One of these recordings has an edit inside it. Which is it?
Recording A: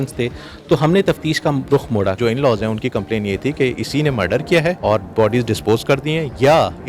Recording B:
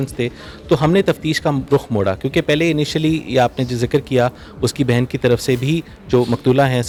A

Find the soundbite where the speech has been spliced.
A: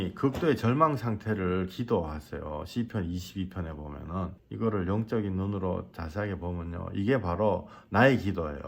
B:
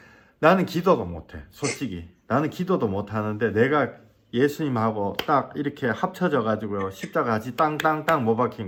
A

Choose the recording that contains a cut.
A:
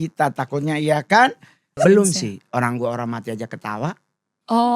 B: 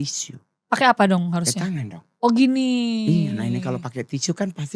A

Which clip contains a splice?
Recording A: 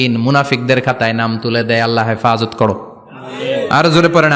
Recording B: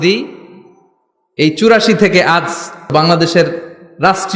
B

